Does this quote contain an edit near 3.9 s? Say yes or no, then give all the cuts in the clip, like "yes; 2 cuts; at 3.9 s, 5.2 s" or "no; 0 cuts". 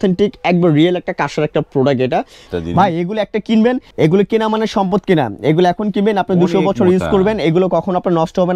yes; 2 cuts; at 2.5 s, 3.9 s